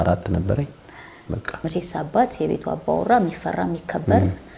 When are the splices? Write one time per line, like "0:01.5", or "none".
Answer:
0:01.6